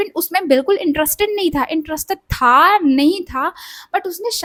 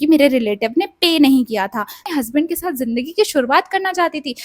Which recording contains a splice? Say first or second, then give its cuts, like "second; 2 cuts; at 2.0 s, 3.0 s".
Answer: second; 1 cut; at 2.0 s